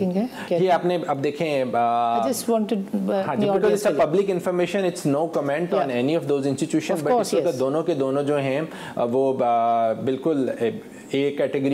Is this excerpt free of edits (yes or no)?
yes